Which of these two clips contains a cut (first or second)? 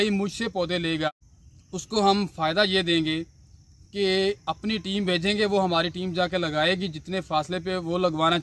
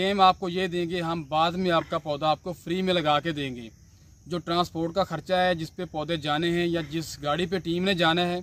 first